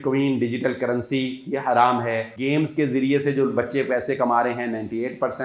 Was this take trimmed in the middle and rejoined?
yes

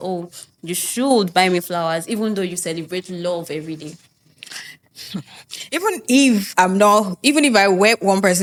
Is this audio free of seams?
yes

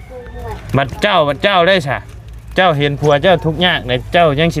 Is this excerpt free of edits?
yes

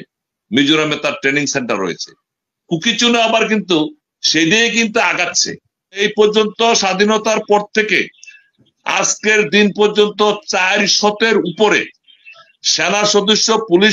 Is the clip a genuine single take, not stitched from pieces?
no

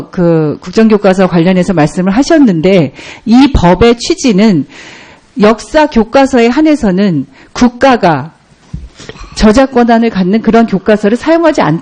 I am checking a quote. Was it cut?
no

